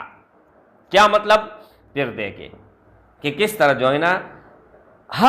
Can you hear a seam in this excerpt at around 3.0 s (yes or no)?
no